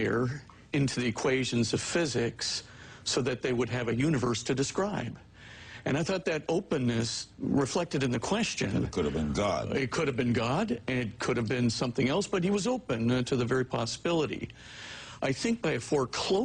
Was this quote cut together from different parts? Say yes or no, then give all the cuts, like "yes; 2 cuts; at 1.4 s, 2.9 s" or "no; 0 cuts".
no; 0 cuts